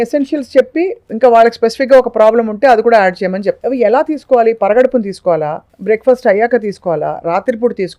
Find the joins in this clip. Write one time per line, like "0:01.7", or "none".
0:03.6
0:05.7